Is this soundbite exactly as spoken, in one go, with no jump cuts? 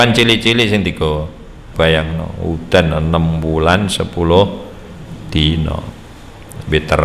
no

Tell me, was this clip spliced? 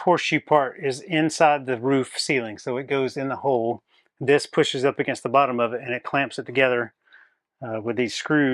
no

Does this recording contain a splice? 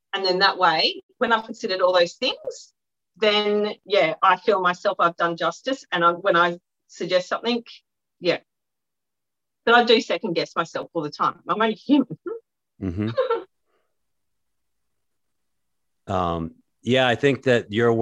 no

